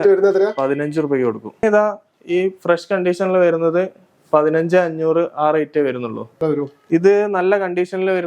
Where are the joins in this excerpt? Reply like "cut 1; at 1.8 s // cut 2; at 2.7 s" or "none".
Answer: cut 1; at 1.6 s // cut 2; at 6.4 s